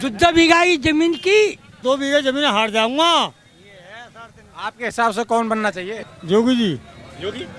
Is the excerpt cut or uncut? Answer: cut